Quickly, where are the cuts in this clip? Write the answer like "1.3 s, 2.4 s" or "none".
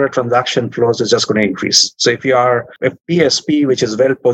2.7 s